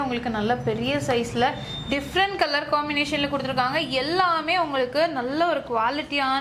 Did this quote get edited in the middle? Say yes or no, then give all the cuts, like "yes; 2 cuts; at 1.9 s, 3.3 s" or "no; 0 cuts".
no; 0 cuts